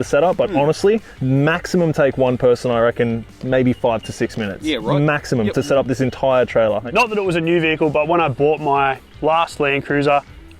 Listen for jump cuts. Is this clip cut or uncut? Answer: cut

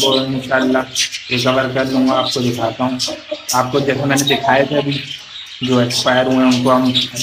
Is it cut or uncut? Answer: uncut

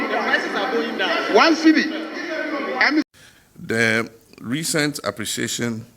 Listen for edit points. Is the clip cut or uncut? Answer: cut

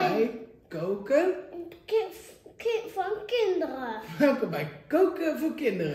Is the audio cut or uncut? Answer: uncut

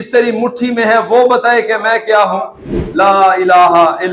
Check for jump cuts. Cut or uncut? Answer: cut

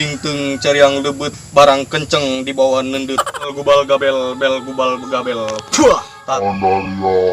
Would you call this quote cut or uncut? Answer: cut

